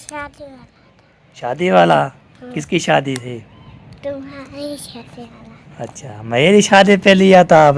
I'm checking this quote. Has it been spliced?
no; 0 cuts

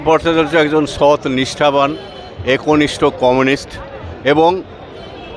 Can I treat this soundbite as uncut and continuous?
yes; 0 cuts

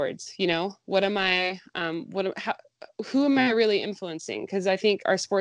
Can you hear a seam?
no; 0 cuts

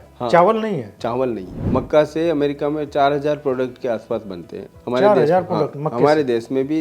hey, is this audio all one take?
no; 1 cut; at 1.5 s

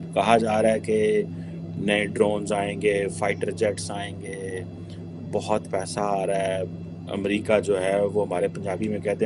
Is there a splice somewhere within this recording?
no; 0 cuts

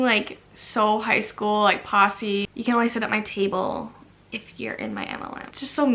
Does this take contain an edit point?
no; 0 cuts

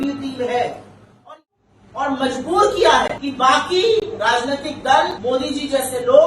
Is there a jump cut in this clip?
yes; 3 cuts; at 1.2 s, 3.2 s, 5.2 s

